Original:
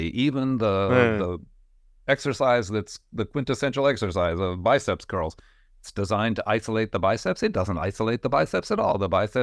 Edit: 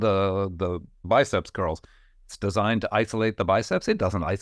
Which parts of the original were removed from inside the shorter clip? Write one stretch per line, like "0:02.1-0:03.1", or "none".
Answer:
0:01.6-0:04.6